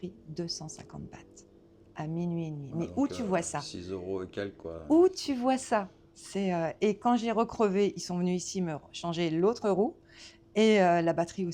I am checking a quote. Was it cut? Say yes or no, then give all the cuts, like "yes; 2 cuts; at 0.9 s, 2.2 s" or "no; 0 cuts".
no; 0 cuts